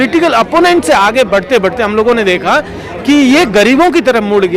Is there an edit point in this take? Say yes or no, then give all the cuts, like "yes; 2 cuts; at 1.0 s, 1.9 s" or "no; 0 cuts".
no; 0 cuts